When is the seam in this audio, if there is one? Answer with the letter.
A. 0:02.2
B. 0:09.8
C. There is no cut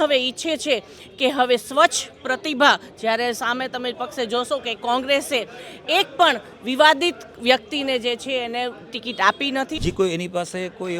B